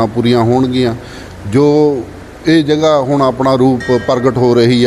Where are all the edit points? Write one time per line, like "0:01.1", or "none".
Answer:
none